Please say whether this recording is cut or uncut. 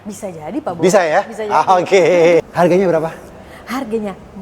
cut